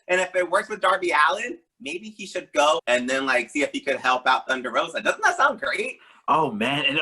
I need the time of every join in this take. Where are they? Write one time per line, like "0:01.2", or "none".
0:02.8